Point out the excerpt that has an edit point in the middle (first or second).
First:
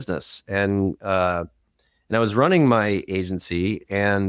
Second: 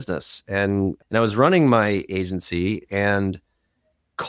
second